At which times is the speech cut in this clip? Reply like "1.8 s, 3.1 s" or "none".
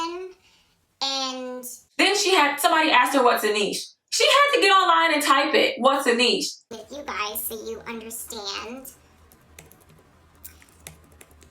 1.8 s